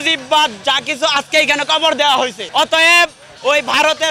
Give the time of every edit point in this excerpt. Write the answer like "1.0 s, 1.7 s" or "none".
2.4 s